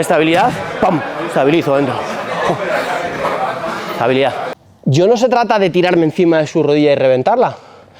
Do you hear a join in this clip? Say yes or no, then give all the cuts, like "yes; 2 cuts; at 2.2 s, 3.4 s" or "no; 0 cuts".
yes; 1 cut; at 4.6 s